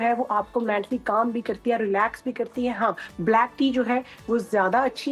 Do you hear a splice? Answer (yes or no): no